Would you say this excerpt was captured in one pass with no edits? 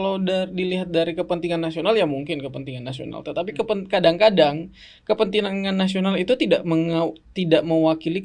yes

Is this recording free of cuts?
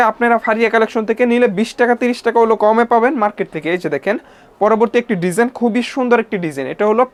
yes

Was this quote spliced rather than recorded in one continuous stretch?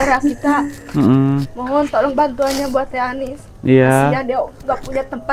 no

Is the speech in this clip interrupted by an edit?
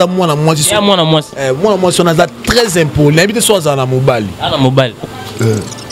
no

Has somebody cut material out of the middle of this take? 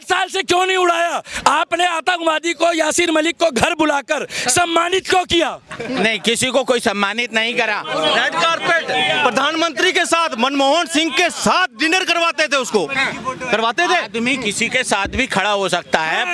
no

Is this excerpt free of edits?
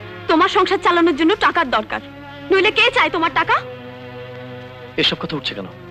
yes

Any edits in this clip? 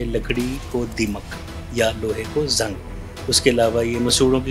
no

